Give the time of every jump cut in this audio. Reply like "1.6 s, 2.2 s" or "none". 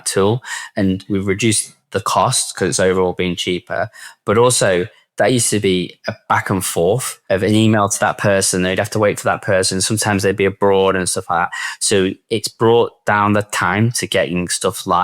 1.0 s, 7.1 s